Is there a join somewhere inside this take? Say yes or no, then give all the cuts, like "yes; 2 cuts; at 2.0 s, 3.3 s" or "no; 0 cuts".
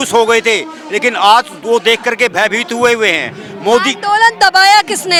no; 0 cuts